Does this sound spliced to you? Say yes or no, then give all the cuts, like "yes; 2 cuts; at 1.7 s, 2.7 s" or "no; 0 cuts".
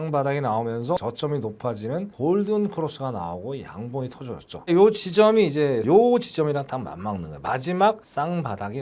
no; 0 cuts